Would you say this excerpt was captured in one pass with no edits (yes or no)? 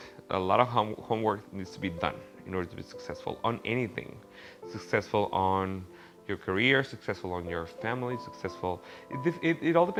yes